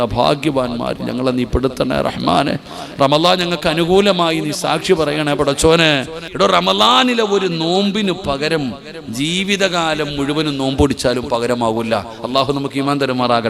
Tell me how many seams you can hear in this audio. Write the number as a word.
one